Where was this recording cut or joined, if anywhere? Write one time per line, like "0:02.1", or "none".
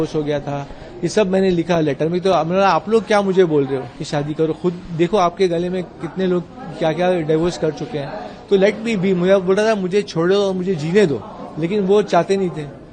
none

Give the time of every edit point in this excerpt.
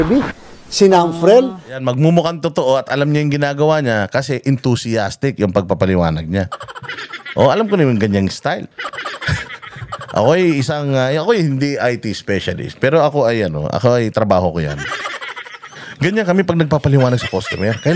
0:08.7

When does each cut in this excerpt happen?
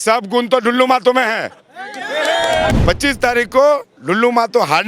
0:02.7

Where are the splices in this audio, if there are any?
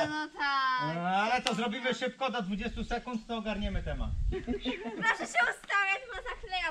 0:04.2

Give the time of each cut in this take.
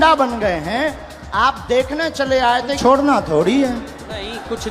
0:02.8

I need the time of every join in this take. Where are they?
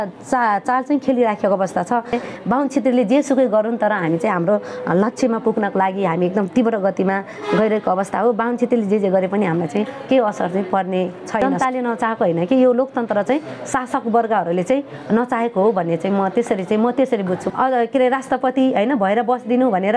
0:02.2
0:11.4
0:17.4

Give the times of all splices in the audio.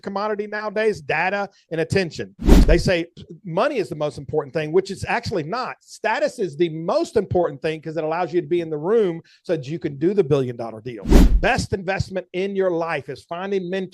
0:02.6
0:11.3

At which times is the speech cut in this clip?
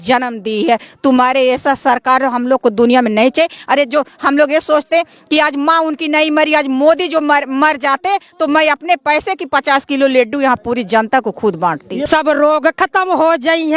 0:12.1

